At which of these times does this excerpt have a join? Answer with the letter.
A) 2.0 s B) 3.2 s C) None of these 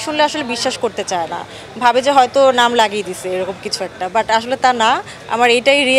C